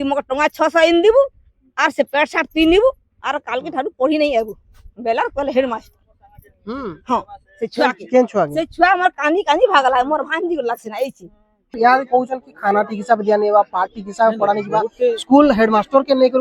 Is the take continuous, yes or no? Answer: no